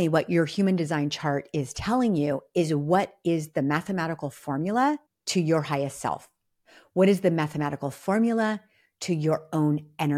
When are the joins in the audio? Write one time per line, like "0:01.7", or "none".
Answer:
0:05.1